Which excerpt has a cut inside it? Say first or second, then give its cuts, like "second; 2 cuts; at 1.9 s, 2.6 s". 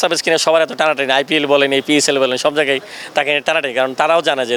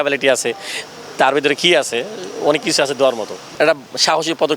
second; 1 cut; at 3.5 s